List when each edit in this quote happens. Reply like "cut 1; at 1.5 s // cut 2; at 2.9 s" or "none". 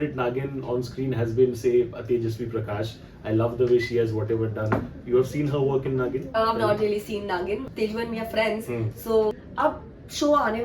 cut 1; at 7.6 s // cut 2; at 9.3 s